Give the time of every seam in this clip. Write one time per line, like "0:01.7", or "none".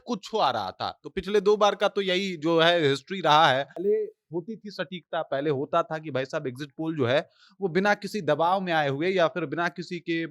0:03.8